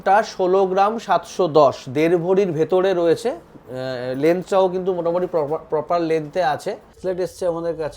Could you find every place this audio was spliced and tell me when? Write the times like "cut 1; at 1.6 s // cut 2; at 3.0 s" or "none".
cut 1; at 7.0 s